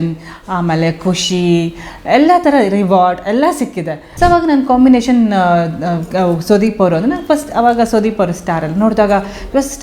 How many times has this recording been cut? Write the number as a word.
one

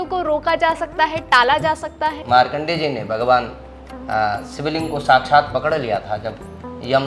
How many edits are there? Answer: one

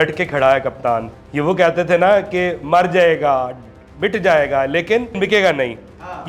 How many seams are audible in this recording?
two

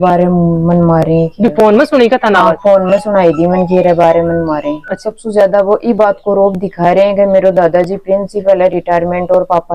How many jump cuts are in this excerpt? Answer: one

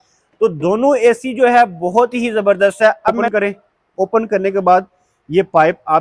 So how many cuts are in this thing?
one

